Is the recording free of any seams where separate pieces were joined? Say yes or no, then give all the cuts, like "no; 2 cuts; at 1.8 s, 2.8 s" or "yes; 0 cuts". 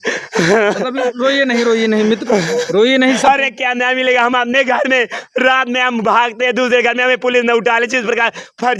no; 1 cut; at 3.2 s